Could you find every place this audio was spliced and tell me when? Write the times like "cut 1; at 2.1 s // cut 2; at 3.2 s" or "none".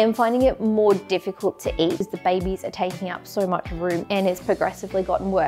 cut 1; at 2.1 s // cut 2; at 4.0 s